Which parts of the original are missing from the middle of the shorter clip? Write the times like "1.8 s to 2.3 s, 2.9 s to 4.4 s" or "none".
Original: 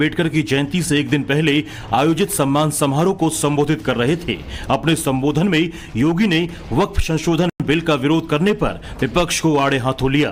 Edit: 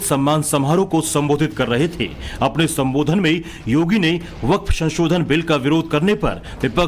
7.5 s to 7.6 s

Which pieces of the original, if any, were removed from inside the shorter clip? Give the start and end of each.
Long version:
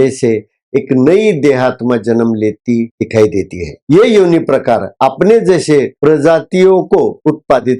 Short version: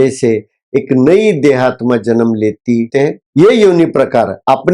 3.0 s to 3.5 s

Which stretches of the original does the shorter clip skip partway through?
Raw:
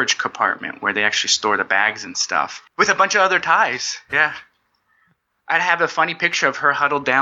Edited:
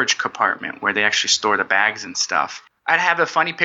2.6 s to 5.2 s

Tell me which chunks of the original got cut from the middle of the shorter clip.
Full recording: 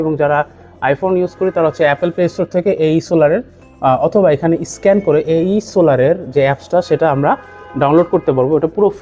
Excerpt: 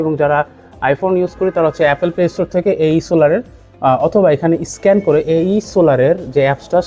none

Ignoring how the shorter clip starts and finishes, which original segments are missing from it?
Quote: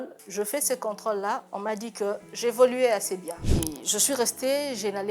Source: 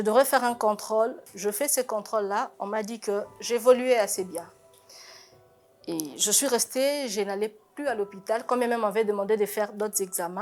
4.5 s to 5.7 s

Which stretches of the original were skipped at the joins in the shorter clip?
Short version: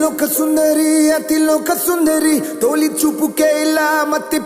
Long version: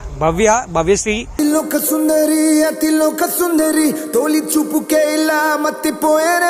none

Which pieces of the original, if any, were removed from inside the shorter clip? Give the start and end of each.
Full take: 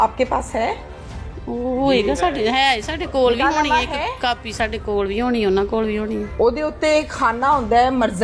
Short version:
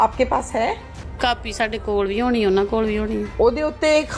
1.1 s to 4.1 s

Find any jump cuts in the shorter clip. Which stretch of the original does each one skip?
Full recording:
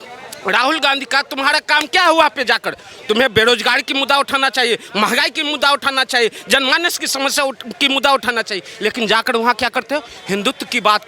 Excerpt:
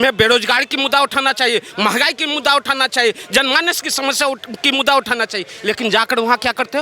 none

